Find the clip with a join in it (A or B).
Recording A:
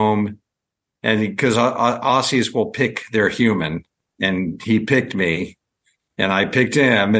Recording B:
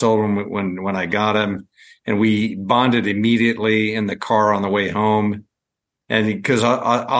A